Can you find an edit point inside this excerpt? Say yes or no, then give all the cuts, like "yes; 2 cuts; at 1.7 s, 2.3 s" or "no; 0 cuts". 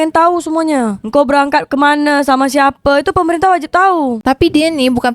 yes; 1 cut; at 4.2 s